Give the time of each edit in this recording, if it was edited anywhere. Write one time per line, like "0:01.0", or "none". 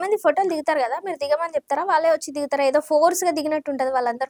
none